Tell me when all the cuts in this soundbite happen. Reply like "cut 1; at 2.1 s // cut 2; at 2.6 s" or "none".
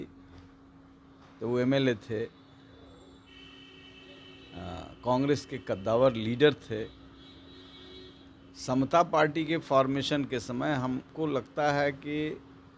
none